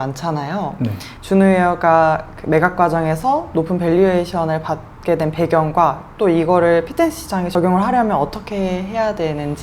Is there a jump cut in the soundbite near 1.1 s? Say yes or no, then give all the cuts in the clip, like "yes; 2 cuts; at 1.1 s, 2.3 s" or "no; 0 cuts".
yes; 1 cut; at 1.1 s